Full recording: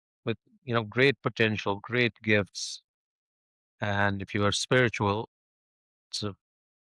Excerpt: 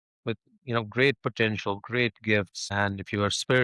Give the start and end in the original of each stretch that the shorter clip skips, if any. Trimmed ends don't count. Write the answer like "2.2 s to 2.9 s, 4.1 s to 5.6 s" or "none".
2.7 s to 3.9 s

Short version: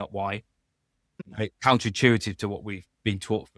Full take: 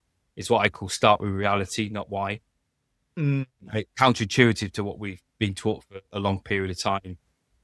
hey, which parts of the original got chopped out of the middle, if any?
3.1 s to 3.5 s

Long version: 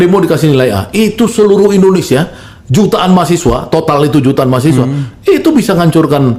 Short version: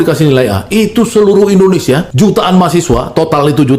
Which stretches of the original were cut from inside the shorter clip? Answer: 2.3 s to 2.6 s

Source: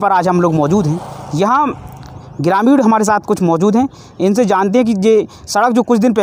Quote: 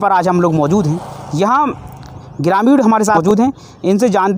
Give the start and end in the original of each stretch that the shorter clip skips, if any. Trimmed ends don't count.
3.2 s to 3.6 s

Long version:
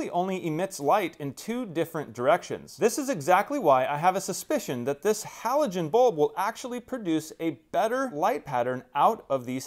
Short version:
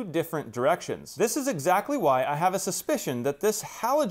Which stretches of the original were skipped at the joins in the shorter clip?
none

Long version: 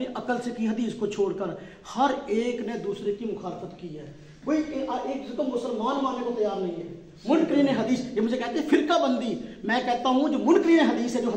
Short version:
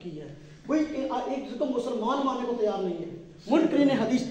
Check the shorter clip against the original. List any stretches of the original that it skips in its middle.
none

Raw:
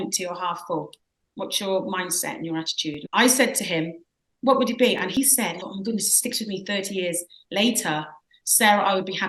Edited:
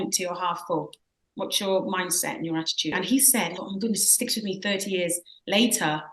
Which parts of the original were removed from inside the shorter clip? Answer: 3.0 s to 5.1 s

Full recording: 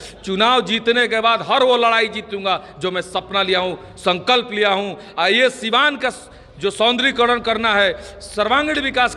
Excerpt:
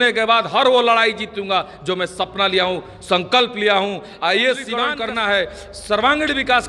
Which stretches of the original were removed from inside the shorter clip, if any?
5.9 s to 7.4 s

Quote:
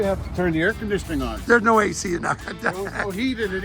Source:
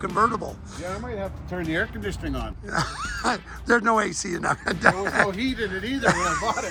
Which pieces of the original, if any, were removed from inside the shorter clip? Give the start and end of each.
2.5 s to 3.5 s

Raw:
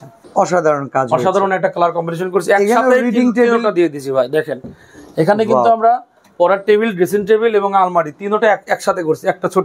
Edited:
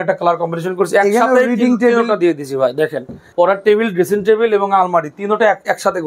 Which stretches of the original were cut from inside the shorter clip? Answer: 4.7 s to 6.2 s

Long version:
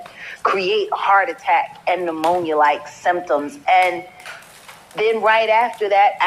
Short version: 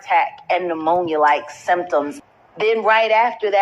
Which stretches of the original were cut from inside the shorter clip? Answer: 3.5 s to 4.5 s

